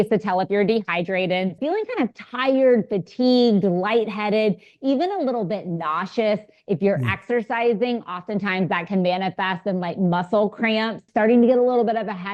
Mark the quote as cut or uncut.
cut